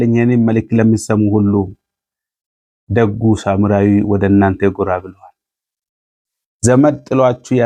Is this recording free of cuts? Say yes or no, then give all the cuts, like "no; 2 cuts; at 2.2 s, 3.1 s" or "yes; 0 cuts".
yes; 0 cuts